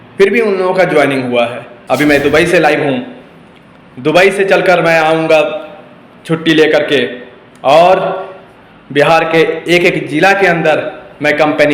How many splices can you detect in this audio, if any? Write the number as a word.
one